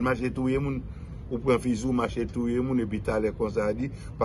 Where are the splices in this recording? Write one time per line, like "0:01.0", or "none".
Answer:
none